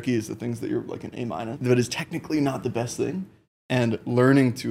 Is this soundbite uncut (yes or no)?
no